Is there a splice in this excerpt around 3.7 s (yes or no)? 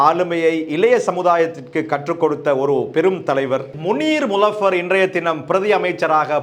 yes